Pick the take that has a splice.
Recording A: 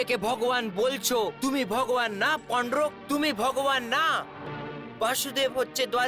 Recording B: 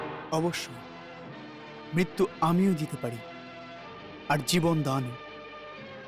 A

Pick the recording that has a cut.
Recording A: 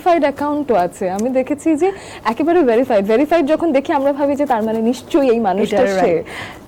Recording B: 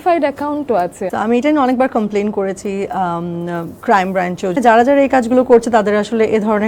B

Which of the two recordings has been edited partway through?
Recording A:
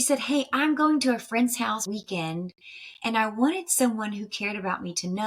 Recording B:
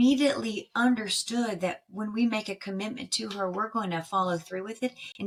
A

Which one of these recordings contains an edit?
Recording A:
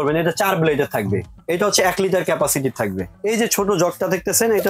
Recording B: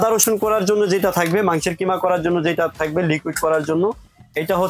A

